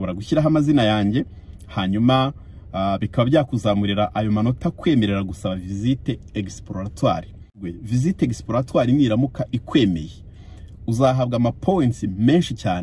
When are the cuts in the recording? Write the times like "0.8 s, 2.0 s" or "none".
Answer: 7.7 s